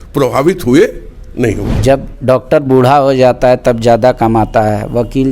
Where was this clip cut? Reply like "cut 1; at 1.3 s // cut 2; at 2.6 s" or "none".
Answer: cut 1; at 1.7 s

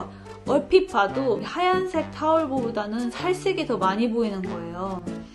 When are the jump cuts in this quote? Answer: cut 1; at 1.5 s

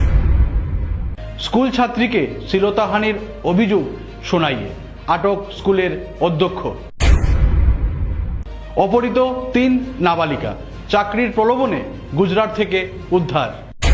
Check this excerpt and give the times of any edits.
cut 1; at 1.2 s

